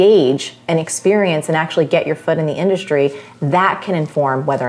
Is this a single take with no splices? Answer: yes; 0 cuts

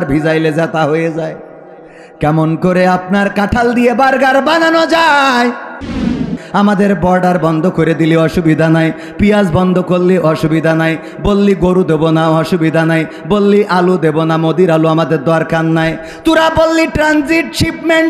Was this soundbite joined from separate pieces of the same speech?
yes; 1 cut; at 6.2 s

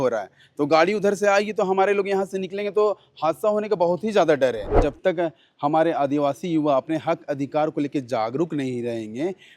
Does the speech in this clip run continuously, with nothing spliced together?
no; 1 cut; at 4.8 s

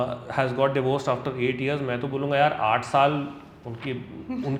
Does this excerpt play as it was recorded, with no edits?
yes; 0 cuts

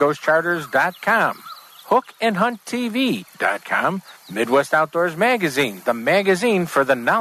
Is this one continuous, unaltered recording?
yes; 0 cuts

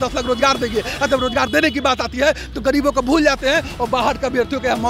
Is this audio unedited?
yes; 0 cuts

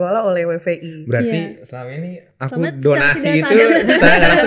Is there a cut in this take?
no; 0 cuts

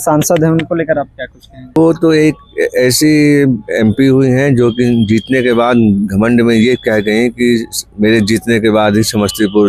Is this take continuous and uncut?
no; 1 cut; at 1.8 s

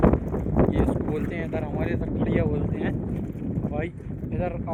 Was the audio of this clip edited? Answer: no; 0 cuts

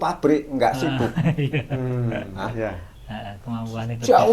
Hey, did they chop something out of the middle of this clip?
no; 0 cuts

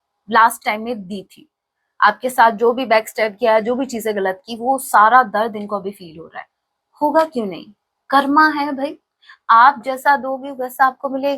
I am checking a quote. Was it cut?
no; 0 cuts

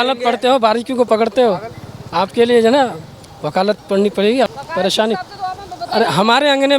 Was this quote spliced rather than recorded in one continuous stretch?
yes; 1 cut; at 4.5 s

